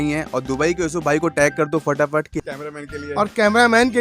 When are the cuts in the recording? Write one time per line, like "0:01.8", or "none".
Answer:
0:02.4

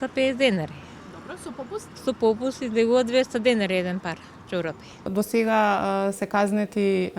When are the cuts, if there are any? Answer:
0:05.1

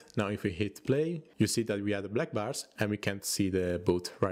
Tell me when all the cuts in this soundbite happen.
0:01.3

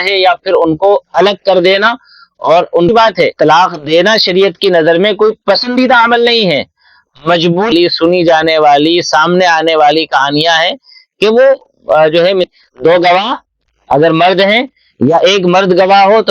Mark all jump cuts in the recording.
0:02.9
0:07.7
0:12.4

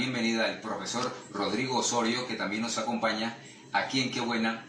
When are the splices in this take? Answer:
none

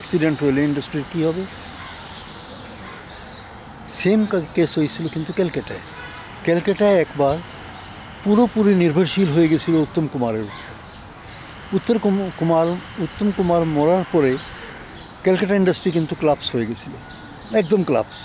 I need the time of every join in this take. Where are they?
none

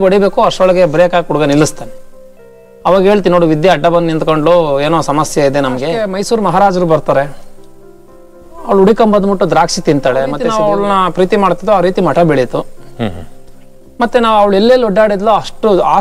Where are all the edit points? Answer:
0:05.9
0:10.4

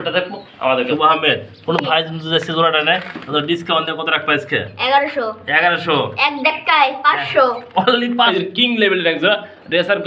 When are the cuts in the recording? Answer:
0:00.9
0:08.3

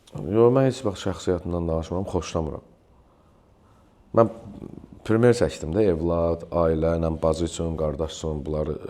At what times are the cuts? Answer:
none

